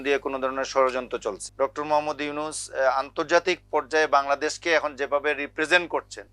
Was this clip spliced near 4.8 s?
no; 1 cut; at 1.4 s

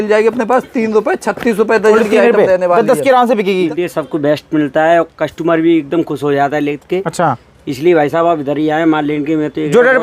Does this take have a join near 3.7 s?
yes; 1 cut; at 3.7 s

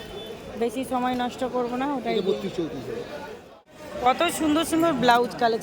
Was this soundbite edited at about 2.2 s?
no; 1 cut; at 3.8 s

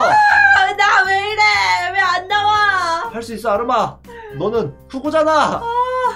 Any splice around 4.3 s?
no; 0 cuts

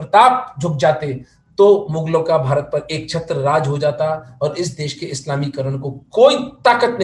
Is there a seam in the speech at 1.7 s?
no; 0 cuts

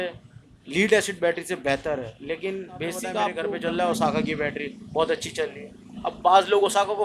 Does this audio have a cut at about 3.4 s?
yes; 1 cut; at 3.4 s

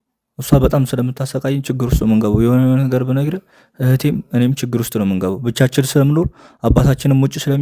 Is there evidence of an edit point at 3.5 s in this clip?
no; 0 cuts

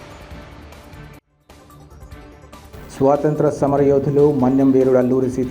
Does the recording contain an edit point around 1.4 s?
no; 1 cut; at 2.7 s

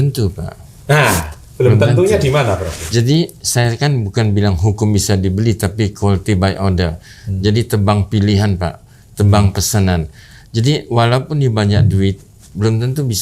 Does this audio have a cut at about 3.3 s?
no; 0 cuts

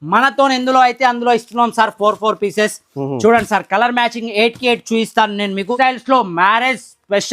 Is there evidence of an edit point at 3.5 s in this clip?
no; 1 cut; at 5.8 s

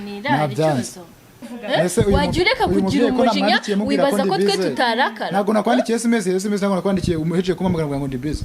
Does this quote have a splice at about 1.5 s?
yes; 1 cut; at 1.5 s

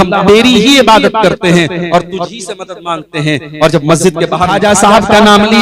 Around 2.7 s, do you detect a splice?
no; 1 cut; at 4.5 s

